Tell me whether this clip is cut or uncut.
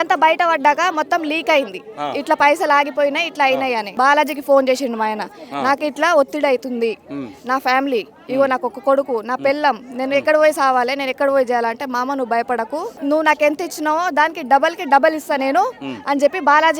cut